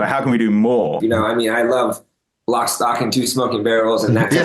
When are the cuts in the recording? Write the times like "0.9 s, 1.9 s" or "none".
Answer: 1.0 s